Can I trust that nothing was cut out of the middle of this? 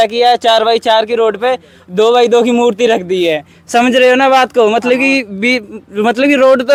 yes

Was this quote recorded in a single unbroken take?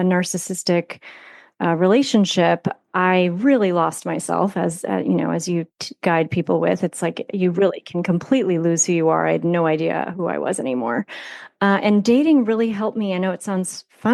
yes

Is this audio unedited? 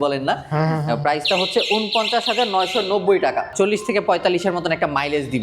no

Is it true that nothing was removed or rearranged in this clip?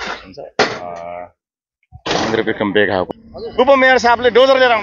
no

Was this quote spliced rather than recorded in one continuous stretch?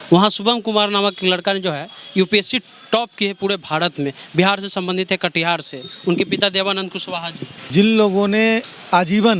yes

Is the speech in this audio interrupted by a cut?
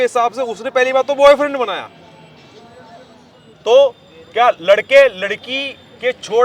yes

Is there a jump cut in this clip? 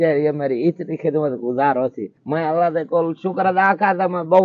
no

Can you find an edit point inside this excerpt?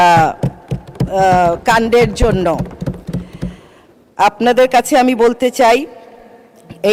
no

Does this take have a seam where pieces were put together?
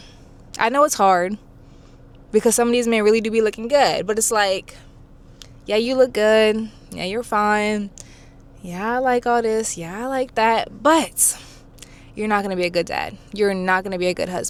no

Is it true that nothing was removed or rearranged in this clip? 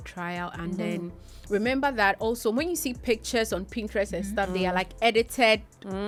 yes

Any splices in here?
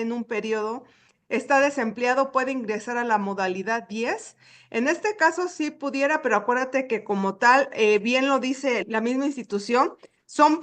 yes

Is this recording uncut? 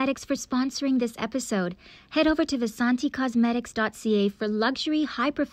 yes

